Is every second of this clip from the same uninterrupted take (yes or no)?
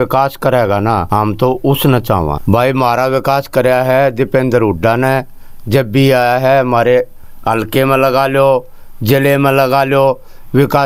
no